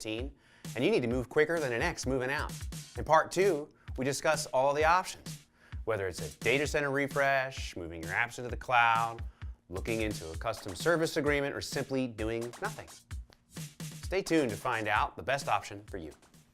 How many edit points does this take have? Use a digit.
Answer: 1